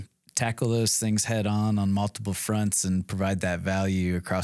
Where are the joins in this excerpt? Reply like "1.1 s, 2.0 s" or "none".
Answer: none